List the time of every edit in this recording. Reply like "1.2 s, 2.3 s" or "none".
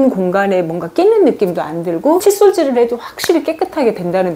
none